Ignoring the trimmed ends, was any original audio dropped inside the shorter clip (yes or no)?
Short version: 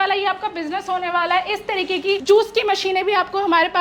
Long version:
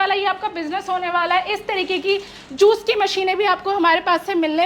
yes